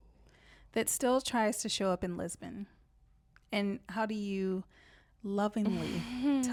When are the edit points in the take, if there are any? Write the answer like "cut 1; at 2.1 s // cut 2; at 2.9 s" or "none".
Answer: none